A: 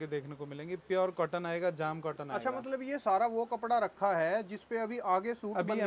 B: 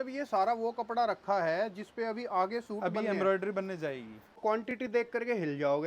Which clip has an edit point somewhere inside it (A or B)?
B